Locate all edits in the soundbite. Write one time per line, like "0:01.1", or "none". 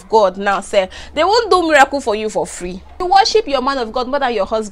0:03.0

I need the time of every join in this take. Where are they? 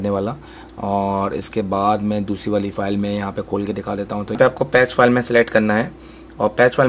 0:04.4

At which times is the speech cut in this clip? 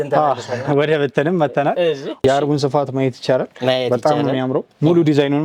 0:02.1

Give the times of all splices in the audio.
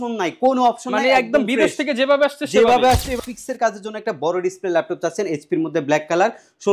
0:03.2

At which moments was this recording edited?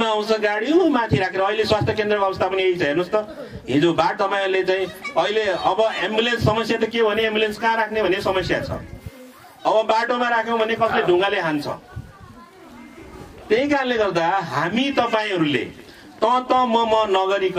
none

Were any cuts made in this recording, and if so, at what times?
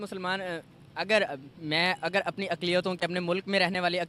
none

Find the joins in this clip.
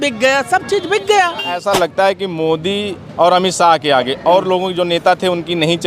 0:01.6

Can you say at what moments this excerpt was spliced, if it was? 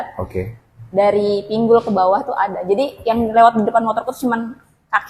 none

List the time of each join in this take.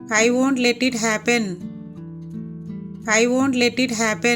0:01.6
0:03.0

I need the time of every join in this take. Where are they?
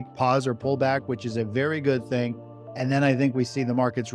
none

